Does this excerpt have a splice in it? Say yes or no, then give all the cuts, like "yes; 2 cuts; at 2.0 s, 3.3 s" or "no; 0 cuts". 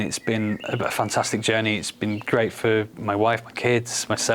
no; 0 cuts